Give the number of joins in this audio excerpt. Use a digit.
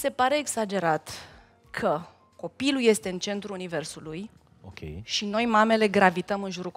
1